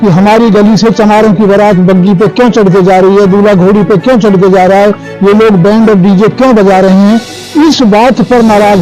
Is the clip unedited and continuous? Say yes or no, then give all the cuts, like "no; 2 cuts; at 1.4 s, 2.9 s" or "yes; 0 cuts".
yes; 0 cuts